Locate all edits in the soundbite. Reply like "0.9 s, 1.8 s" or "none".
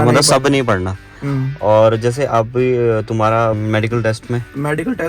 3.6 s